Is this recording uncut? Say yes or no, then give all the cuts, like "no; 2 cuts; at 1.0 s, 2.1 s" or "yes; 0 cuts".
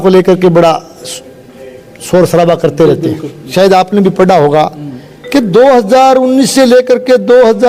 no; 1 cut; at 3.5 s